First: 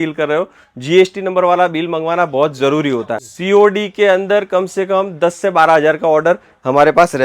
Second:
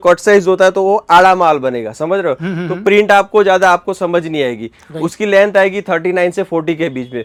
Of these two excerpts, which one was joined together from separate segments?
first; 1 cut; at 3.1 s

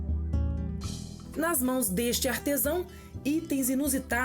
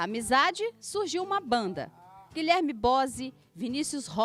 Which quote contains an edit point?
first; 1 cut; at 1.2 s

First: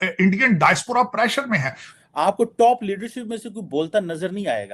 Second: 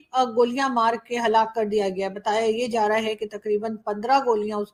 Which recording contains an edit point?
first; 1 cut; at 1.8 s

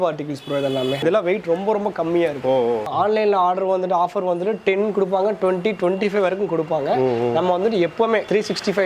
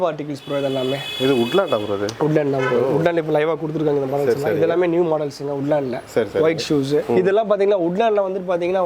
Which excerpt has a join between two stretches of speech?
first; 2 cuts; at 1.0 s, 2.8 s

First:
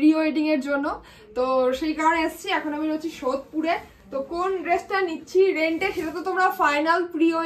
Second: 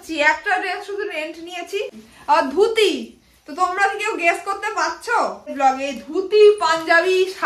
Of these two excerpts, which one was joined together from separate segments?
second; 2 cuts; at 2.1 s, 5.5 s

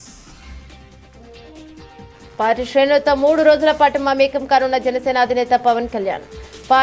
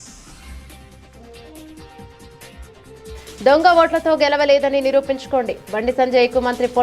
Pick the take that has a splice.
first; 1 cut; at 2.3 s

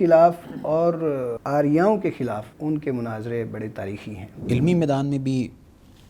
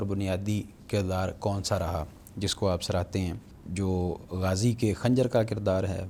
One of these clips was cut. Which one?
first; 3 cuts; at 1.4 s, 2.5 s, 4.3 s

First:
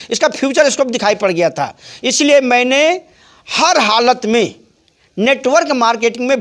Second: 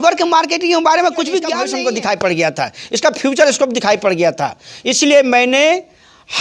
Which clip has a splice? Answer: second; 1 cut; at 1.6 s

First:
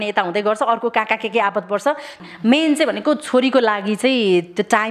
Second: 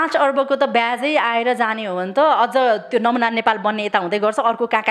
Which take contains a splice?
first; 1 cut; at 2.1 s

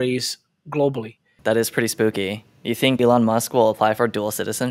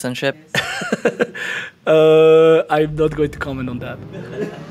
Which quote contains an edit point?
first; 2 cuts; at 1.3 s, 3.0 s

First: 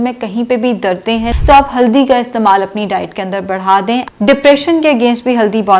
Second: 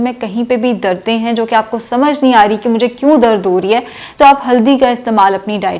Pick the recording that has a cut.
first; 2 cuts; at 1.3 s, 4.0 s

